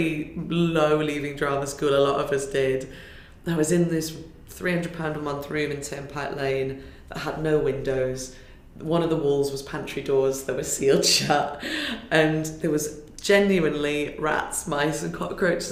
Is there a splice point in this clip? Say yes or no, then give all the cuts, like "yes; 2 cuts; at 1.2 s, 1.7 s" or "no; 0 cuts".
no; 0 cuts